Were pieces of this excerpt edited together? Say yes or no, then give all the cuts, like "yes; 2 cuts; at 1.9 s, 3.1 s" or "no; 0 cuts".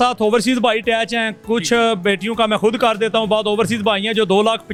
no; 0 cuts